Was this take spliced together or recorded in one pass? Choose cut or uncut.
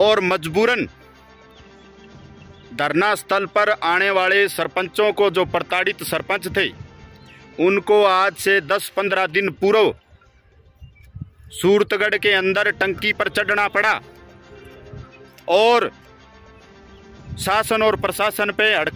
cut